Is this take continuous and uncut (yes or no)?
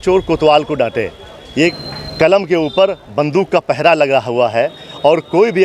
no